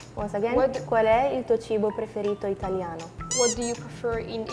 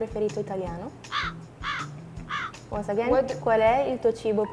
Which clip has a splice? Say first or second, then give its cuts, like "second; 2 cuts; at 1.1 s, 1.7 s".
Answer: second; 1 cut; at 1.0 s